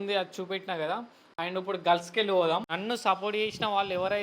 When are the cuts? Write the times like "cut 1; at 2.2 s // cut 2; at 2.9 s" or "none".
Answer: cut 1; at 2.7 s